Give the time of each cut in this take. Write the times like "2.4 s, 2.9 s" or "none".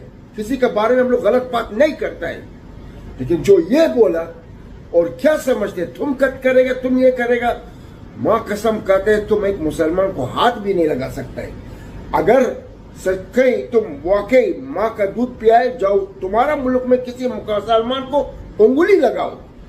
none